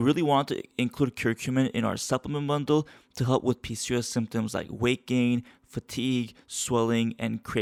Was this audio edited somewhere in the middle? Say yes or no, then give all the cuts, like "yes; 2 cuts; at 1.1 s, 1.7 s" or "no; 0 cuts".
no; 0 cuts